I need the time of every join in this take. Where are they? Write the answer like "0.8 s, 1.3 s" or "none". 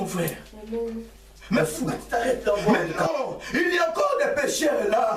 2.7 s

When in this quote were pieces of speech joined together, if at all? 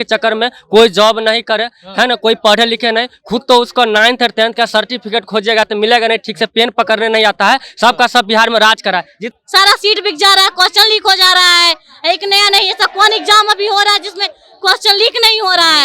9.2 s

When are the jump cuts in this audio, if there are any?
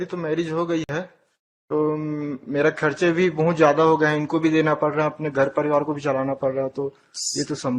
none

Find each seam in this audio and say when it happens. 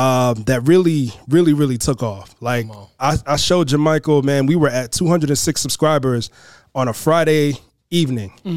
none

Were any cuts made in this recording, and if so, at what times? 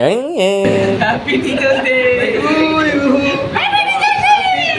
1.0 s

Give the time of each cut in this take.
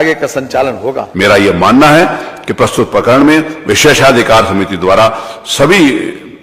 1.1 s

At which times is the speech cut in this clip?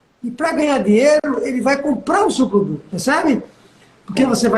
1.3 s, 2.9 s

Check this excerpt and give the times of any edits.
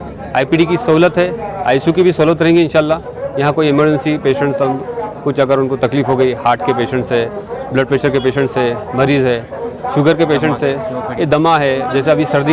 none

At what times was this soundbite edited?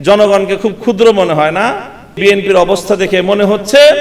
2.2 s

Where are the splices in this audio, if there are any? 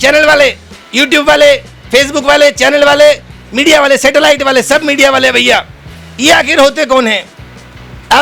none

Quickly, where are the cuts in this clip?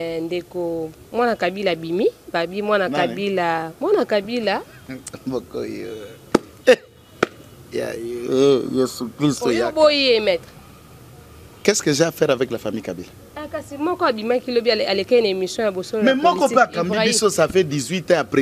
none

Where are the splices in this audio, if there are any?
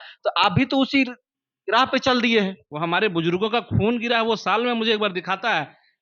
2.7 s

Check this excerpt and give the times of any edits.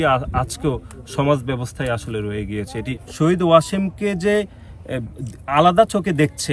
3.0 s

